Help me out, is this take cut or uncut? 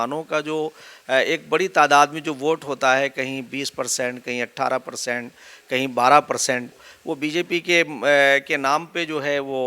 cut